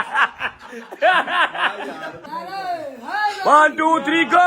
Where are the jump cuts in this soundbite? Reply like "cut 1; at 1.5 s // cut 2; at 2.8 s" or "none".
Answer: cut 1; at 2.3 s